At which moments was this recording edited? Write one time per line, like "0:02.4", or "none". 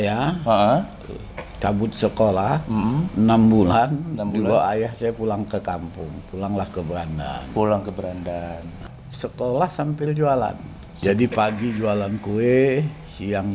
0:09.0
0:10.9